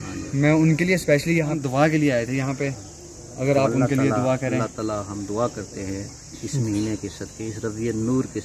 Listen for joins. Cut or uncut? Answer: cut